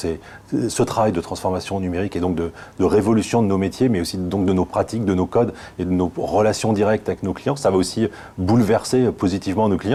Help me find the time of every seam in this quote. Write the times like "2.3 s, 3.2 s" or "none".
none